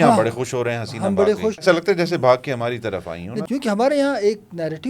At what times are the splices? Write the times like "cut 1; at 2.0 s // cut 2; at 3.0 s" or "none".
cut 1; at 1.6 s // cut 2; at 3.3 s